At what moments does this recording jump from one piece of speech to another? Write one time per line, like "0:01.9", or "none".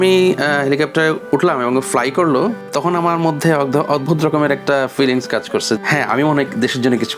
0:02.6
0:05.8